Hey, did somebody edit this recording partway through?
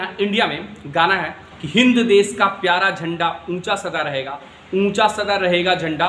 no; 0 cuts

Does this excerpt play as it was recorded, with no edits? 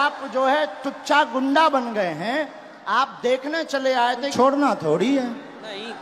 no; 1 cut; at 4.3 s

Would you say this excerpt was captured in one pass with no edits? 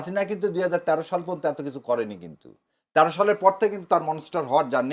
yes; 0 cuts

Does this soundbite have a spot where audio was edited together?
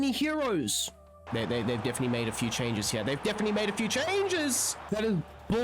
yes; 2 cuts; at 1.2 s, 4.7 s

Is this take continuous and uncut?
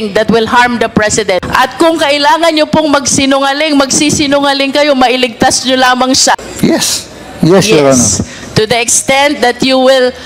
no; 2 cuts; at 1.5 s, 6.4 s

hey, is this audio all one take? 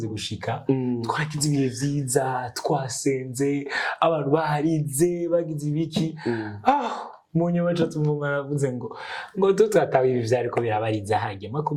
yes; 0 cuts

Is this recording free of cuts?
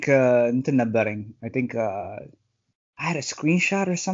yes; 0 cuts

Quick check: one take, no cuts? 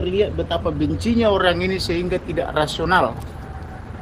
yes; 0 cuts

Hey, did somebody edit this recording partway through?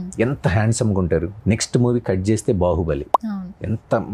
yes; 1 cut; at 1.3 s

